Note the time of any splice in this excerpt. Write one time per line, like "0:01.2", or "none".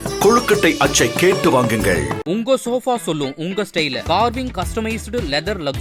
none